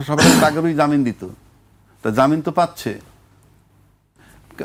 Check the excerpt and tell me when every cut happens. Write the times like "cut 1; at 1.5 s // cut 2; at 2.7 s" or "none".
none